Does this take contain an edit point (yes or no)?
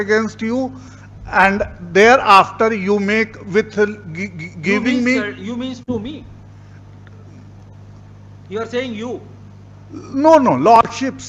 no